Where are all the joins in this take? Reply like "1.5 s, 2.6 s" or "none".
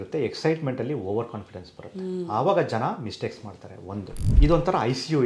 4.2 s